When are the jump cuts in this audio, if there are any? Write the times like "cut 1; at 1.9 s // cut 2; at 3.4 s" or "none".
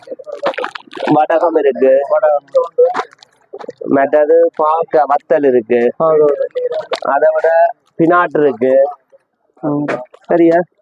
none